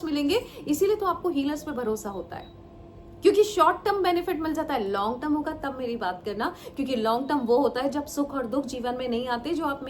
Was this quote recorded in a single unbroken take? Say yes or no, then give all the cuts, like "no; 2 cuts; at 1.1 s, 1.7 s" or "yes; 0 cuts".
yes; 0 cuts